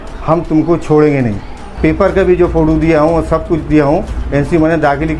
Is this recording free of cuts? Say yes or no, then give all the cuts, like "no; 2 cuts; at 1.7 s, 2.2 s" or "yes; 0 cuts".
no; 1 cut; at 1.6 s